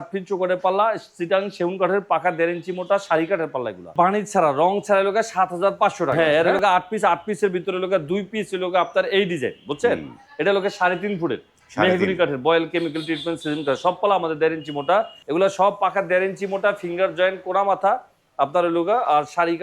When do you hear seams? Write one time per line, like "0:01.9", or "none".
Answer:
0:03.9
0:06.1
0:15.2

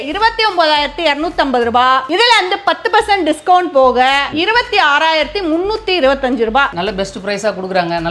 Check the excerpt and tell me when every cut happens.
0:02.1
0:04.3
0:06.7

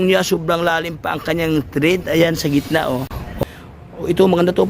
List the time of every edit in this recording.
0:03.4

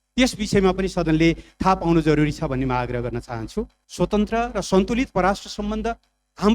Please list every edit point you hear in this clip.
0:03.8

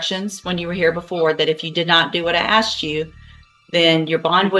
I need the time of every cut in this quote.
none

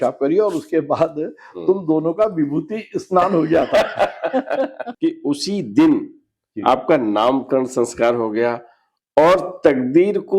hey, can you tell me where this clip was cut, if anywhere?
0:04.9

